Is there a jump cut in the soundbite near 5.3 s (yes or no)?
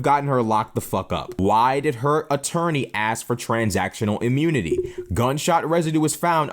no